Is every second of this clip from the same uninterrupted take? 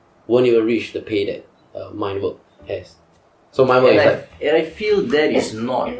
yes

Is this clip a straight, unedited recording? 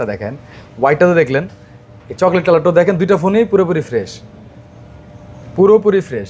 yes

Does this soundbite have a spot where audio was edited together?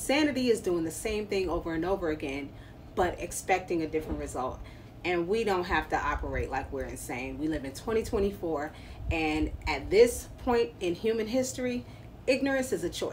no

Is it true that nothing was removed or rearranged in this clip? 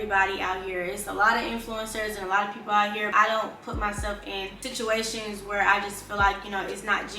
no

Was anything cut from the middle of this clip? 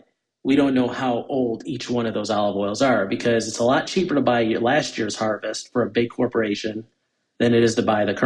no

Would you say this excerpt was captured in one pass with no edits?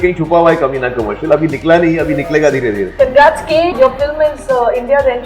no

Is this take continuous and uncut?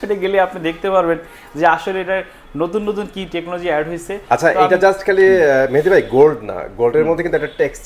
yes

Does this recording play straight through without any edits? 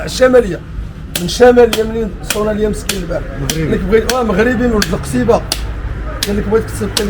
yes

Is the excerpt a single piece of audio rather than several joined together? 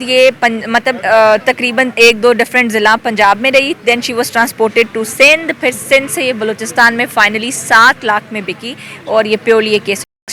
yes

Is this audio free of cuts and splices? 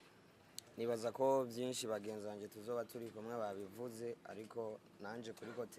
yes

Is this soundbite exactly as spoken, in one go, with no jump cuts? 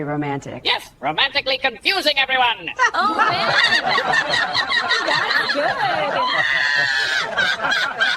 yes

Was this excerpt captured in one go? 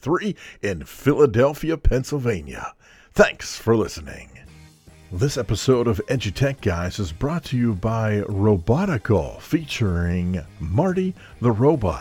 no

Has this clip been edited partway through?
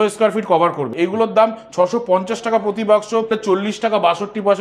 yes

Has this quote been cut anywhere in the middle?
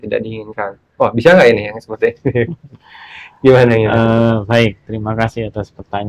no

